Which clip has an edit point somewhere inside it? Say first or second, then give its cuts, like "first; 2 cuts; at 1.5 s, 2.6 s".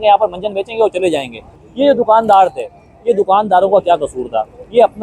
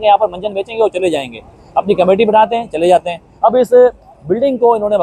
first; 1 cut; at 1.6 s